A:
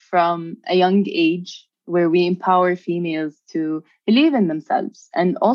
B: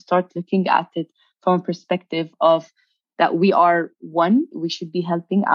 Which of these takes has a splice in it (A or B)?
B